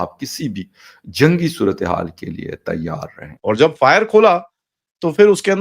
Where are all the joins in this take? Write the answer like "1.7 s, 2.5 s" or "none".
3.3 s